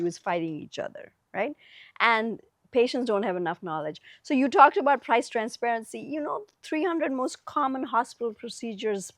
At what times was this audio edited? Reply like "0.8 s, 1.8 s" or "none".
none